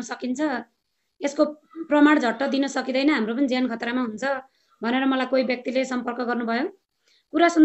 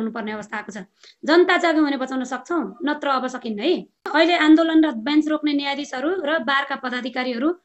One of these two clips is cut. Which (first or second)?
second